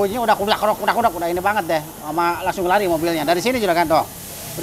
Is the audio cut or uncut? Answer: uncut